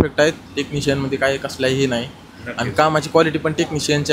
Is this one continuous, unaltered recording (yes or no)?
yes